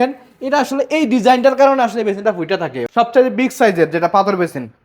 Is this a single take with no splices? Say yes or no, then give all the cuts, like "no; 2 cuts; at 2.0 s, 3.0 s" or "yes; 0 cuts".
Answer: no; 1 cut; at 2.8 s